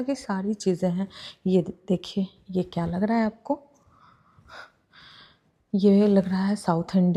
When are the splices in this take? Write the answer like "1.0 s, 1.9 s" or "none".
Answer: none